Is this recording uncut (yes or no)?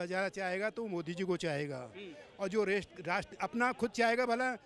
yes